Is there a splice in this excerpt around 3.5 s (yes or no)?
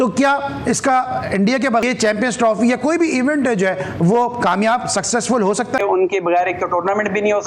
no